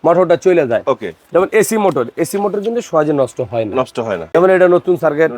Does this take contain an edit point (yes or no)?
yes